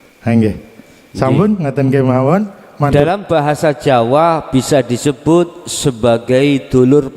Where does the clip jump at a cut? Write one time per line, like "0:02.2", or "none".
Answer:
0:02.9